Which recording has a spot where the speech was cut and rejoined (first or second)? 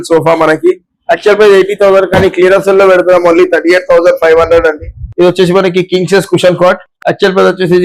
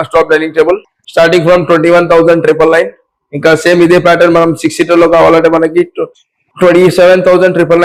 first